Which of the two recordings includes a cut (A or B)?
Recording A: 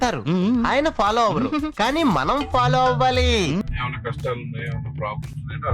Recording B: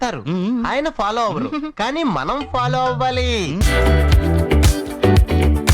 A